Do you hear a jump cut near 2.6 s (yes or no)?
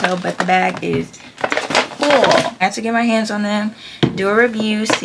yes